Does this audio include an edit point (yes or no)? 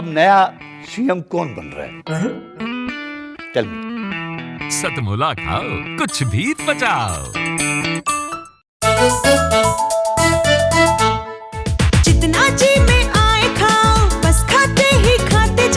yes